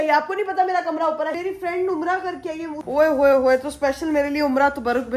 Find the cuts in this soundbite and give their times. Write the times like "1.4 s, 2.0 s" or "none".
1.3 s, 2.8 s